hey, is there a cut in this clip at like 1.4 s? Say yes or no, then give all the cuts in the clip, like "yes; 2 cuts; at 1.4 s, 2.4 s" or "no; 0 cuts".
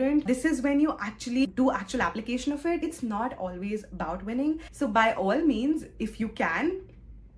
yes; 3 cuts; at 1.4 s, 2.9 s, 4.7 s